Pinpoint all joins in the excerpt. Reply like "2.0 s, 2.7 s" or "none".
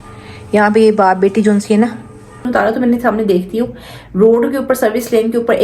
2.5 s